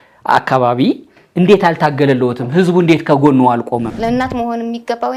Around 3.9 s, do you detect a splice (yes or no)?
yes